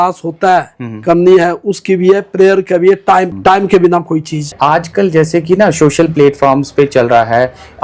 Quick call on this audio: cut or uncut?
cut